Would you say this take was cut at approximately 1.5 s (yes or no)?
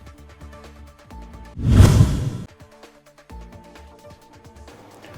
yes